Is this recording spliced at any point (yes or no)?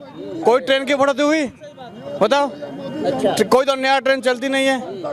no